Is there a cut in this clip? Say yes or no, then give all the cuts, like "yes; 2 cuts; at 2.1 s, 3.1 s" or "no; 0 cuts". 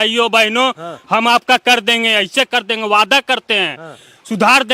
no; 0 cuts